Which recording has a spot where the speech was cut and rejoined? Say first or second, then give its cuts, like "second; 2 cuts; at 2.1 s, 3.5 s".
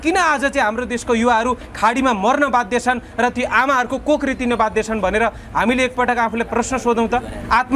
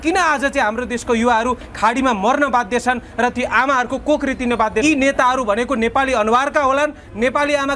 second; 1 cut; at 4.8 s